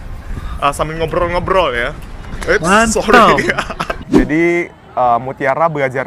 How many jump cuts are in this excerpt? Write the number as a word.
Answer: one